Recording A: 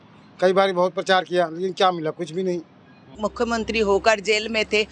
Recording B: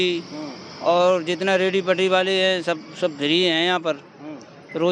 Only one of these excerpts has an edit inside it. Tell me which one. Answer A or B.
A